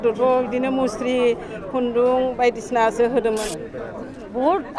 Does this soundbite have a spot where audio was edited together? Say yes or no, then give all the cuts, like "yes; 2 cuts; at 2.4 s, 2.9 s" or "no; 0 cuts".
yes; 1 cut; at 3.5 s